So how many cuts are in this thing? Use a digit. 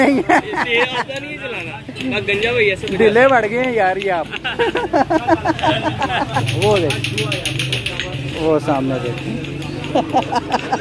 1